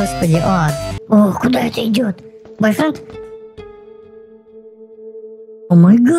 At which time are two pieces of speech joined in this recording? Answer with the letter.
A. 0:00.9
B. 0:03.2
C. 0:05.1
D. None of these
A